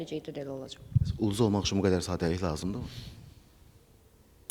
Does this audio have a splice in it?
no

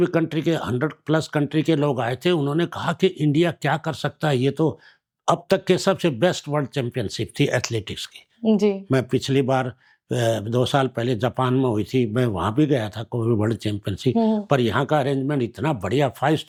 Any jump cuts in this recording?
no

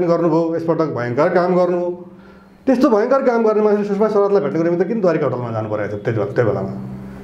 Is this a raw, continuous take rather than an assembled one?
yes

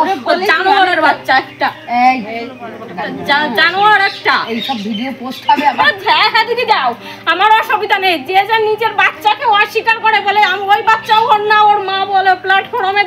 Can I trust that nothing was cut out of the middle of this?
yes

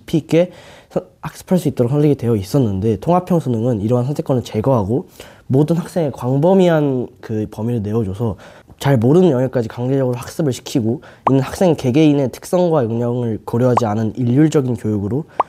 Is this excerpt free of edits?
yes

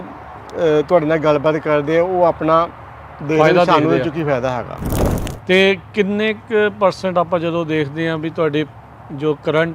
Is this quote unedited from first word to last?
no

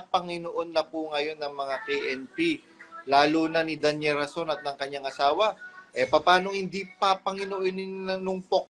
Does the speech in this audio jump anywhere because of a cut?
no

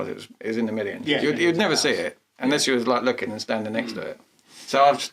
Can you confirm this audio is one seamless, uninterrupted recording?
no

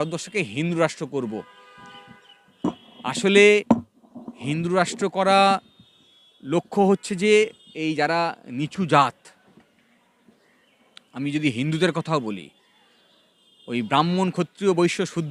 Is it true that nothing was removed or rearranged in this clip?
yes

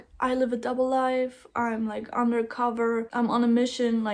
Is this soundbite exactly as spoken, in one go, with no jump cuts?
yes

